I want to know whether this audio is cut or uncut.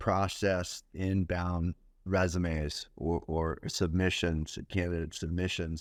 uncut